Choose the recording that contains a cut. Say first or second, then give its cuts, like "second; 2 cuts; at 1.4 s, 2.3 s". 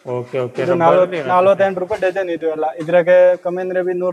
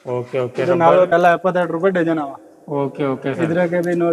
second; 1 cut; at 1.1 s